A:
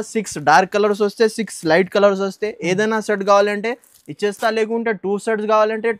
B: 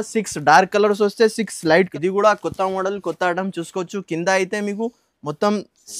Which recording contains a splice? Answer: B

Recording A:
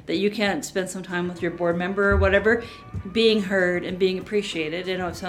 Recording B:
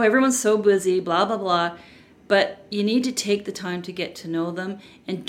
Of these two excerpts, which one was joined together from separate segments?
A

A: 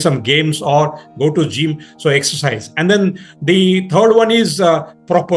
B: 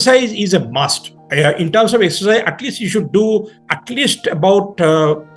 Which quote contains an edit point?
B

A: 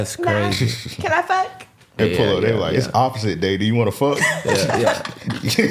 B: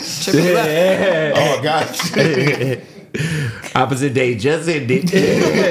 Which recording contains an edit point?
A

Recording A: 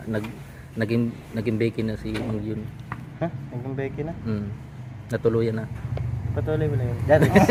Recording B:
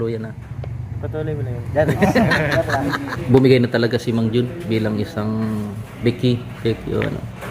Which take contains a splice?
B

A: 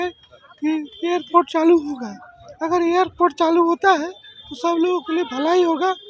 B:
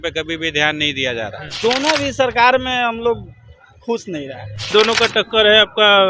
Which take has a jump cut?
B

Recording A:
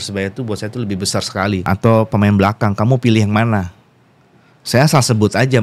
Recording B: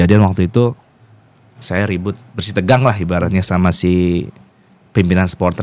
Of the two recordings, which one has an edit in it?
A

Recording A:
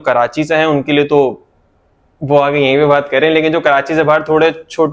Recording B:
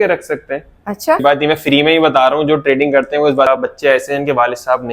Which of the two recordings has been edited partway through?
B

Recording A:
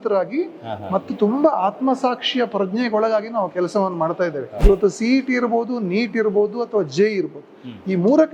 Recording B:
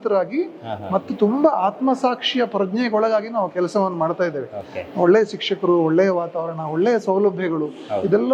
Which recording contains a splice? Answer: A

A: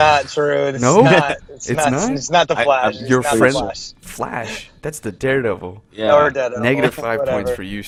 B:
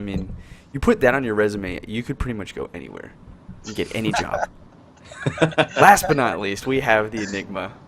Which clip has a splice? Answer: B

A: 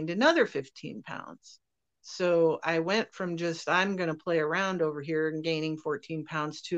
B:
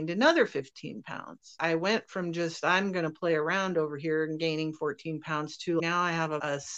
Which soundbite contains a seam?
B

